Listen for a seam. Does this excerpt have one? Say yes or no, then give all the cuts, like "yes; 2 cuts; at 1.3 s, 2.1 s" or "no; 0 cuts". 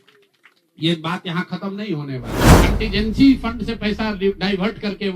yes; 1 cut; at 2.5 s